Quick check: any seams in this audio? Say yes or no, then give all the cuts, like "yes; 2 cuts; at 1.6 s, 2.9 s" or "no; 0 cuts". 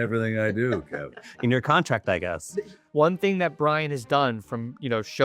yes; 1 cut; at 2.8 s